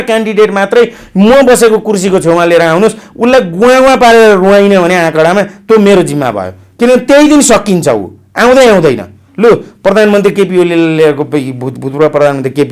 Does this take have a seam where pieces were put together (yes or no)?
no